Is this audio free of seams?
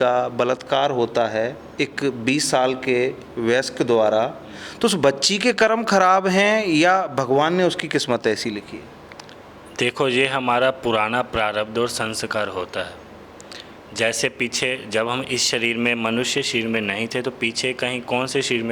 yes; 0 cuts

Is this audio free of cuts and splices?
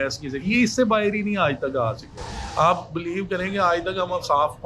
yes; 0 cuts

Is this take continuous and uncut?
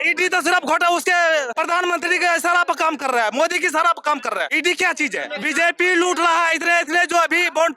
no; 3 cuts; at 1.5 s, 4.5 s, 5.3 s

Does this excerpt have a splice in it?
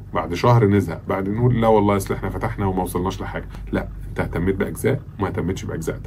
yes; 1 cut; at 3.6 s

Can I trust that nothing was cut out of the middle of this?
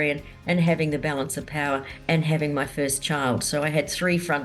yes; 0 cuts

